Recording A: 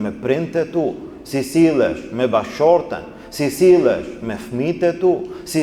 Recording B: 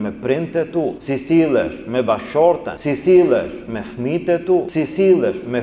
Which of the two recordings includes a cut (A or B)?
B